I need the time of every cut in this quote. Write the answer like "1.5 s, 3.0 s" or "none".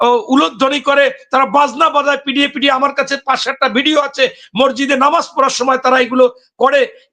none

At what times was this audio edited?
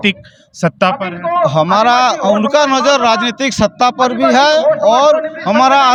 none

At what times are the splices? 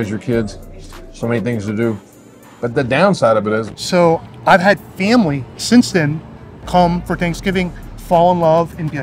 3.7 s

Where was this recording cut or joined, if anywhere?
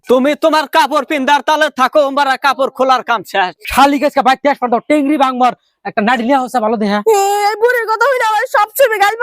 3.6 s, 7.0 s

